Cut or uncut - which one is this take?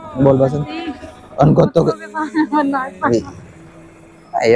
uncut